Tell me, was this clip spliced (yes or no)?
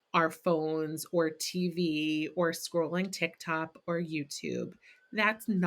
no